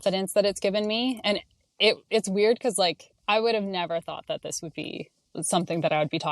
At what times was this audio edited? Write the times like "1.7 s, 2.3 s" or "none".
3.1 s, 5.2 s